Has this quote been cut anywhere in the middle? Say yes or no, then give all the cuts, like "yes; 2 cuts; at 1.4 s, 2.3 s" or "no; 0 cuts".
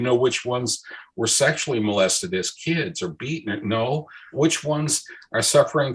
yes; 1 cut; at 4.3 s